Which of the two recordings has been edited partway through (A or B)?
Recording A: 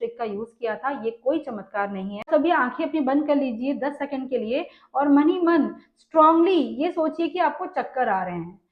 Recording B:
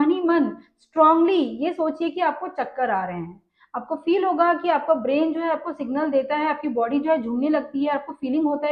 A